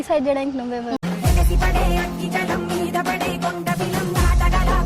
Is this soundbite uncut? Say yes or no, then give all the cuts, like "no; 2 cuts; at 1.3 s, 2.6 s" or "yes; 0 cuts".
no; 1 cut; at 1.0 s